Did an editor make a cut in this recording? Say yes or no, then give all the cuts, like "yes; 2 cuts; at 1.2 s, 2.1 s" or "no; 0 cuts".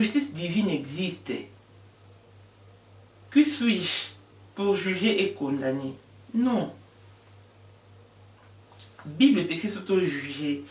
no; 0 cuts